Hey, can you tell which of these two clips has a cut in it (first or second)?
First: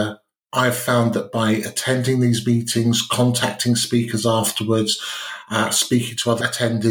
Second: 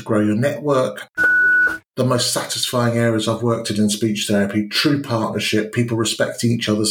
second